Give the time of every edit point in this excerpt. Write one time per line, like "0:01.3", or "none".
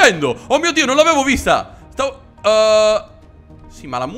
none

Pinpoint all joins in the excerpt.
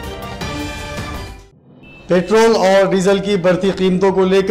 none

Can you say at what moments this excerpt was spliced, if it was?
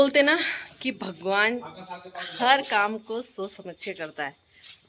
none

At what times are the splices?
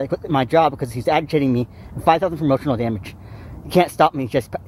none

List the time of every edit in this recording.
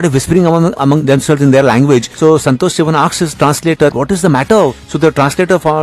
0:00.8
0:02.1
0:03.9
0:04.8

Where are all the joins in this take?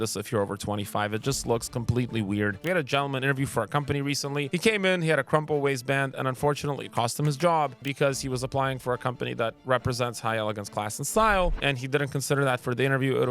0:02.6
0:04.5
0:07.8
0:11.6

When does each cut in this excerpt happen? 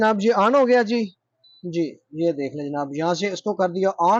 none

